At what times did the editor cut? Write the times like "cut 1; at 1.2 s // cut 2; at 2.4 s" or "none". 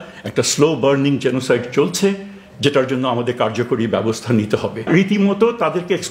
cut 1; at 4.8 s